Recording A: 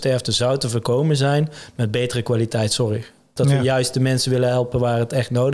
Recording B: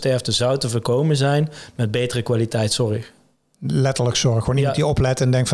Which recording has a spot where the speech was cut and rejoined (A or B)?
A